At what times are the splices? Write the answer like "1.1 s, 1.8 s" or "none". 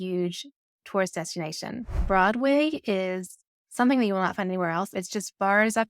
2.0 s, 4.9 s